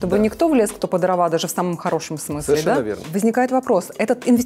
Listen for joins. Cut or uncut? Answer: cut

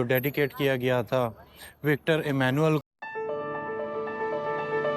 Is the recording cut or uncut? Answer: cut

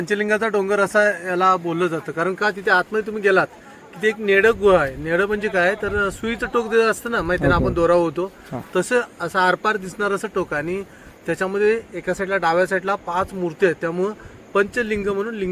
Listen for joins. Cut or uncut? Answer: uncut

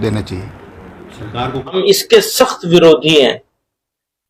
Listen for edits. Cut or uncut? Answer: cut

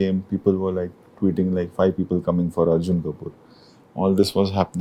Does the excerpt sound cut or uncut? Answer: uncut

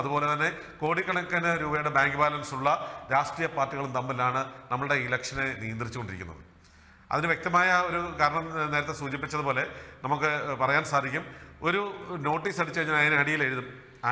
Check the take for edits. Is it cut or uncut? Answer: uncut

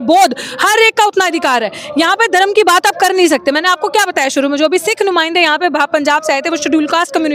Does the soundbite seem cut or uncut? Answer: uncut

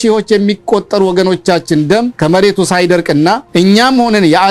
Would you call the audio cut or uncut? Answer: cut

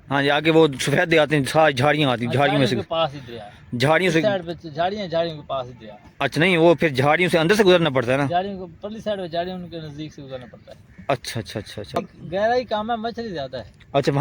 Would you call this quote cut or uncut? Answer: cut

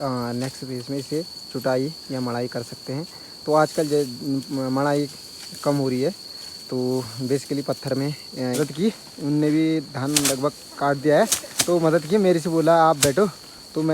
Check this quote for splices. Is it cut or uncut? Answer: cut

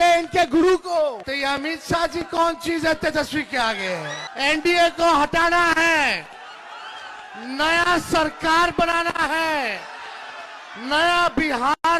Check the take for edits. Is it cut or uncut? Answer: cut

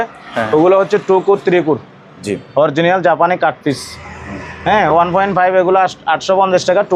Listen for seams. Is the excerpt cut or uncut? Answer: uncut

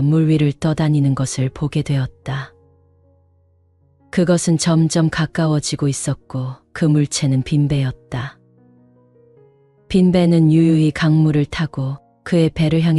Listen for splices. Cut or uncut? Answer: uncut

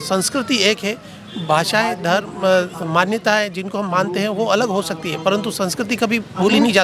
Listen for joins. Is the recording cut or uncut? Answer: uncut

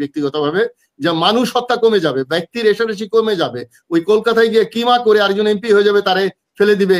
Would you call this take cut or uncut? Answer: uncut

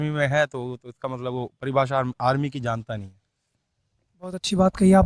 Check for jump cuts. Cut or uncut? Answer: uncut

